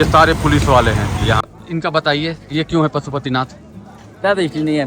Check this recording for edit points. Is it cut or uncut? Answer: cut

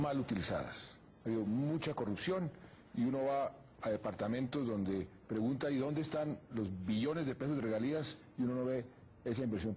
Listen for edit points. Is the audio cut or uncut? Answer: cut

